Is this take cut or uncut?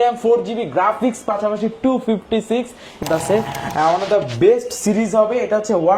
cut